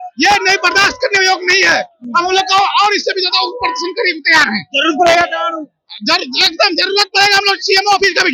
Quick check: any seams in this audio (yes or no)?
no